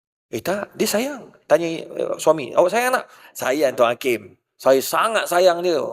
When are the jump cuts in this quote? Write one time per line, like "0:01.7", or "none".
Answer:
0:03.3